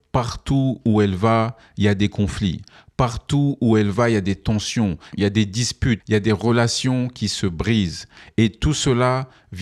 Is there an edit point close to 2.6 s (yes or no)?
no